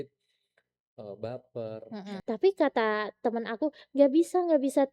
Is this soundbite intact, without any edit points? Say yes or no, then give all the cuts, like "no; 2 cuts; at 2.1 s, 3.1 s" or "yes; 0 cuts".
no; 1 cut; at 2.1 s